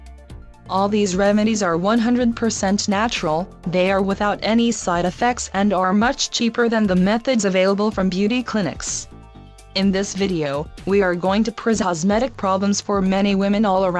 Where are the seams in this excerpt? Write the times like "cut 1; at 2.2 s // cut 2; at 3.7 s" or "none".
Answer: none